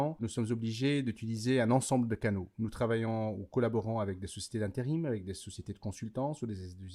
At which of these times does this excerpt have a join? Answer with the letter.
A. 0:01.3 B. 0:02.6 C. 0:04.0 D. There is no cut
D